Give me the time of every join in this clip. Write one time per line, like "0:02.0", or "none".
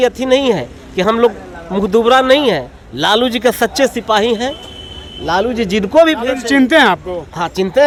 none